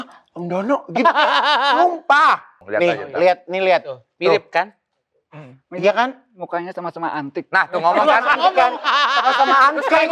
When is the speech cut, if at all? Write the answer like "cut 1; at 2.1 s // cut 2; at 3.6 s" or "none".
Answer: cut 1; at 2.6 s